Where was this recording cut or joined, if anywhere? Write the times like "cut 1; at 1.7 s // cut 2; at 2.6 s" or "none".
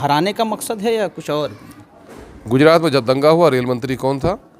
cut 1; at 1.8 s